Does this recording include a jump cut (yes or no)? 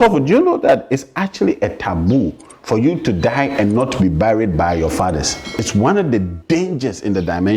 yes